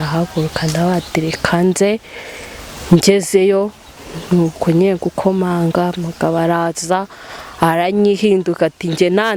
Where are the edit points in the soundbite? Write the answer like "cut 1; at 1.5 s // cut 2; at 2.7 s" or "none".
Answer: none

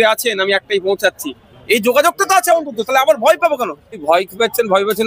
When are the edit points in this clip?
cut 1; at 4.0 s

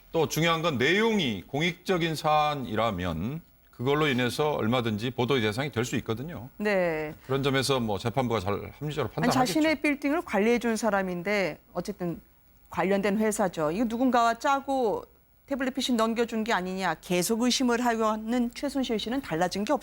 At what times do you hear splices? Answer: cut 1; at 14.2 s

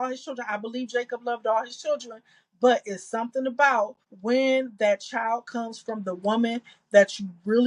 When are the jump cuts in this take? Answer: cut 1; at 4.1 s

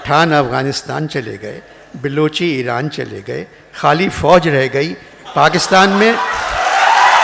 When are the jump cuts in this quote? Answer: none

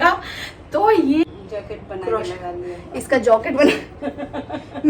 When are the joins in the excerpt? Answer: cut 1; at 1.3 s

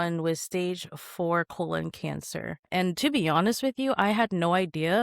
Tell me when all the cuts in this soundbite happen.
cut 1; at 2.7 s

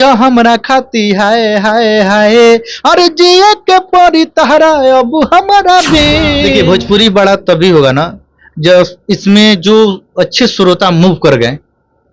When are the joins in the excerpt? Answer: cut 1; at 6.5 s

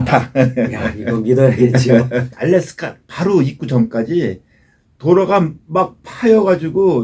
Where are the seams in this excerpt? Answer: cut 1; at 2.3 s

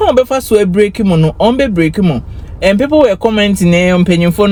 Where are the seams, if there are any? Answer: none

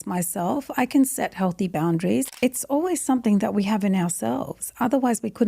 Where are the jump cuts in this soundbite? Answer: cut 1; at 2.3 s

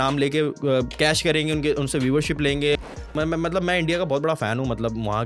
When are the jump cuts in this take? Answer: cut 1; at 2.8 s

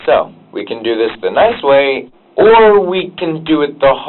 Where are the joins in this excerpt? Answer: cut 1; at 2.1 s

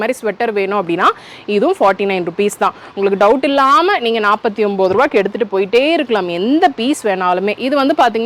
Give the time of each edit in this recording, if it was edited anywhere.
none

